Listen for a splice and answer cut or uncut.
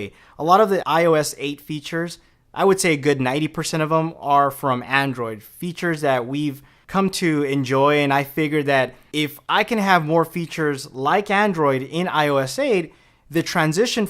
cut